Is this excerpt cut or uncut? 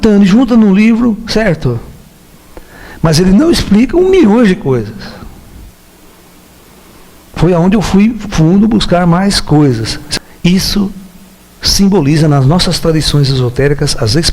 cut